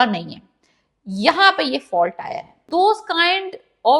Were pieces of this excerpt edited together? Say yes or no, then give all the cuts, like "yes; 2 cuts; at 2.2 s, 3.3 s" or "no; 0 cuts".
yes; 1 cut; at 2.7 s